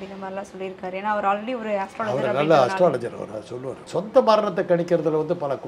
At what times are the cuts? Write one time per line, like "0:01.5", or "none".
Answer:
0:03.8